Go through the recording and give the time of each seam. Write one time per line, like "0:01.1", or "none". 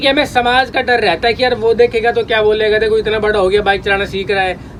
none